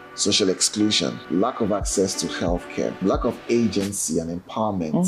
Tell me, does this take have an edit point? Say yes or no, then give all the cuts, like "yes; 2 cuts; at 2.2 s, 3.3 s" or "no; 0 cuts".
yes; 2 cuts; at 1.2 s, 3.0 s